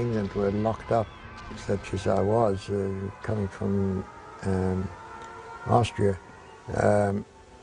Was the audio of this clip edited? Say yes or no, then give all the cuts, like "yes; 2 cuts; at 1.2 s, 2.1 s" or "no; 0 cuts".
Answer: yes; 1 cut; at 1.5 s